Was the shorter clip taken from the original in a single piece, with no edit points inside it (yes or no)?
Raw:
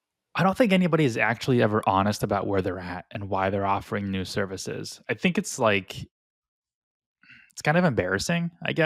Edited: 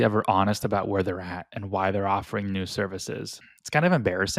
no